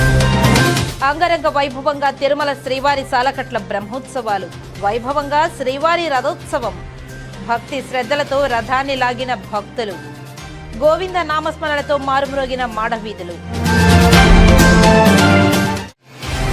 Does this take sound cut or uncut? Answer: cut